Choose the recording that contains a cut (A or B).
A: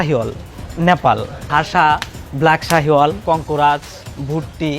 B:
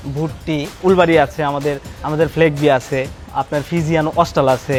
A